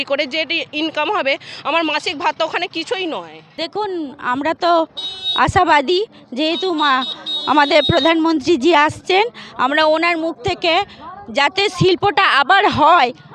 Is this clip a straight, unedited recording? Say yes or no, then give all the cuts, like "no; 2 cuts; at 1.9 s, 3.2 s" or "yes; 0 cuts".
yes; 0 cuts